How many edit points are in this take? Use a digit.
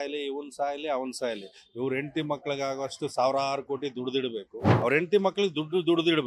1